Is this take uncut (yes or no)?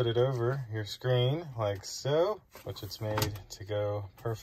yes